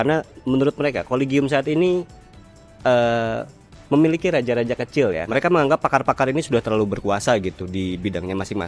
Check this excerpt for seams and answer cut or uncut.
uncut